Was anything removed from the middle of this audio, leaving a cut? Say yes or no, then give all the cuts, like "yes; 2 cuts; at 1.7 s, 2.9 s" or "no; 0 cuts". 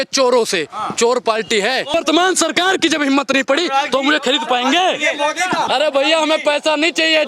yes; 2 cuts; at 1.9 s, 5.7 s